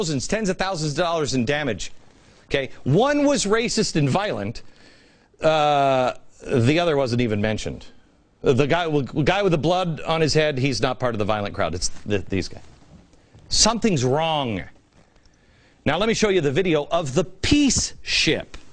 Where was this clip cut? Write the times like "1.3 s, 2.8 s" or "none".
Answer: 3.7 s, 17.7 s